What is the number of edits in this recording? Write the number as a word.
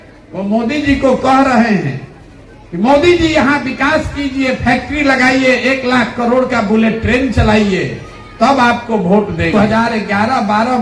one